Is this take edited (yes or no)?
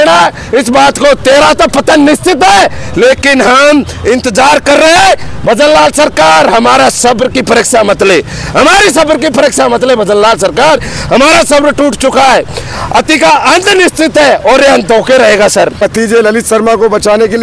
yes